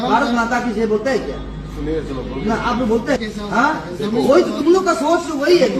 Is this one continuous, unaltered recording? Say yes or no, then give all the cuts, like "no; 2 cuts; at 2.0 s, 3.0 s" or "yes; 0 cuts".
yes; 0 cuts